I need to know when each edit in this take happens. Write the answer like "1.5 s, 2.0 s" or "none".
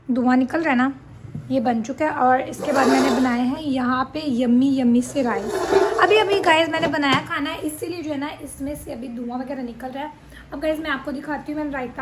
none